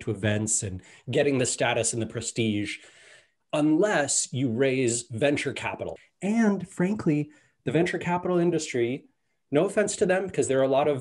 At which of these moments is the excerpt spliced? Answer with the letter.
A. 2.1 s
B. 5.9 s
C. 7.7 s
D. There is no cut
B